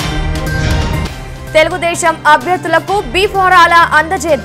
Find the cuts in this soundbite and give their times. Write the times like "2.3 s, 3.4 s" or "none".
none